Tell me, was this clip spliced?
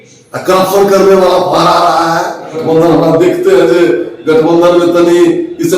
yes; 1 cut; at 2.6 s

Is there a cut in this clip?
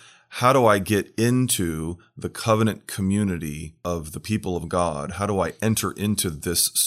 yes; 1 cut; at 3.7 s

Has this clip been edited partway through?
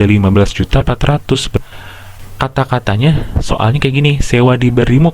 yes; 1 cut; at 1.6 s

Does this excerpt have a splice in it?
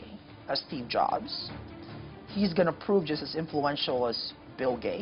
no; 0 cuts

